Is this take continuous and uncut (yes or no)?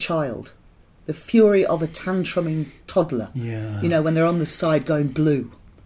yes